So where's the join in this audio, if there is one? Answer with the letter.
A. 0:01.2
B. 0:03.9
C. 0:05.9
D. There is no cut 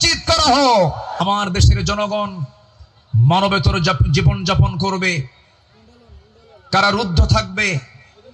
A